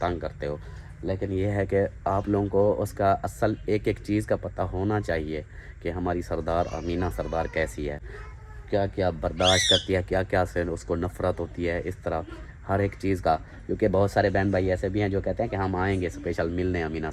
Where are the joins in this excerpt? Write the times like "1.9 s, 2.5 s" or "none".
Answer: none